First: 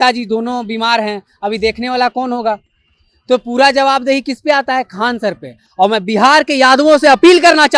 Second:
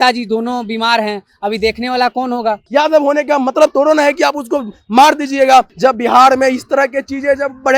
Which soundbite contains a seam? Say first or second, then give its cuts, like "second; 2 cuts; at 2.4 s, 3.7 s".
second; 2 cuts; at 2.6 s, 5.7 s